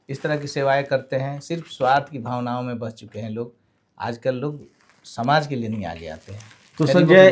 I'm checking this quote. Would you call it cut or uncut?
uncut